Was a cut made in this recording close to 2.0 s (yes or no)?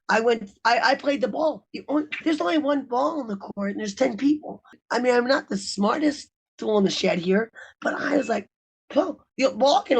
no